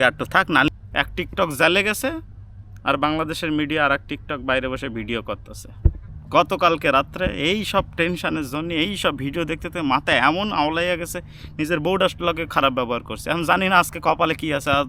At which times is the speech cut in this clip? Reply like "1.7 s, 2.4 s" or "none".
0.7 s, 6.1 s